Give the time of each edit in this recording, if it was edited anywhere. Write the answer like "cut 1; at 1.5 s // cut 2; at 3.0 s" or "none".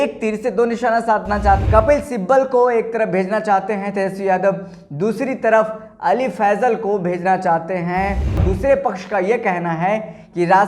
cut 1; at 1.6 s // cut 2; at 8.4 s